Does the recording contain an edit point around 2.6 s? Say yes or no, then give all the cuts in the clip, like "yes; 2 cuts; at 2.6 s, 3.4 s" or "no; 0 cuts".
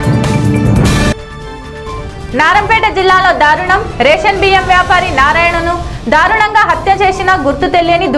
no; 1 cut; at 1.1 s